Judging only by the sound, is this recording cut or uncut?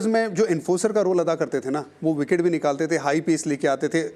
uncut